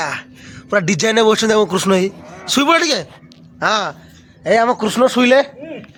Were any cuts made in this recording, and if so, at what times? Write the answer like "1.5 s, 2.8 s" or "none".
none